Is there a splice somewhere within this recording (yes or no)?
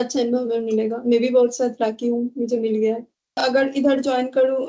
yes